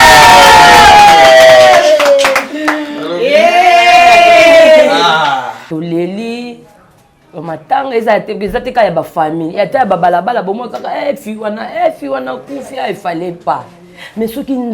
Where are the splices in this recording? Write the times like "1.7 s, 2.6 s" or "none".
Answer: 5.6 s